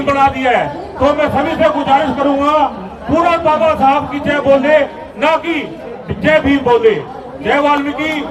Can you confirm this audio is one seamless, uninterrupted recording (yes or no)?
yes